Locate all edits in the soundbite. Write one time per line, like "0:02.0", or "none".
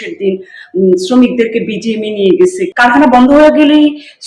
0:02.7